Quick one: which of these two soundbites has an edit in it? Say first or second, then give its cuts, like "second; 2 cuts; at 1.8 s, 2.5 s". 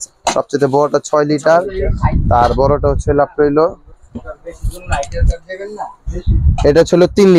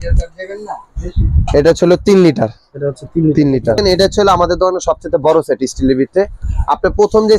second; 1 cut; at 3.8 s